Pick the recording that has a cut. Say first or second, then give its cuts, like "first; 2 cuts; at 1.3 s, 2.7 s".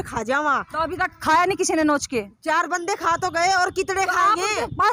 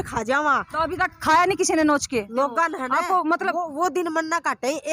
second; 1 cut; at 2.3 s